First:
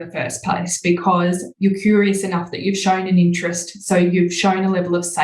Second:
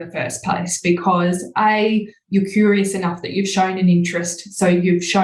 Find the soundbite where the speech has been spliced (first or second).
first